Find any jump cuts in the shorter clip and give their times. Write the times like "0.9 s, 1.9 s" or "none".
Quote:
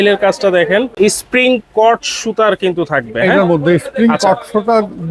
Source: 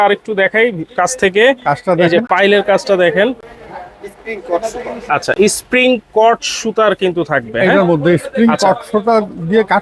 0.9 s